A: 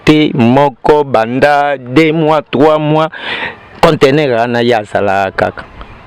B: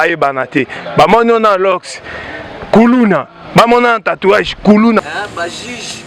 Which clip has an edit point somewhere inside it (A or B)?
B